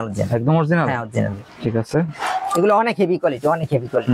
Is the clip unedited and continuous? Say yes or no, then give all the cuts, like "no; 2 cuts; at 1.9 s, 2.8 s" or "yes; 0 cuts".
no; 1 cut; at 1.4 s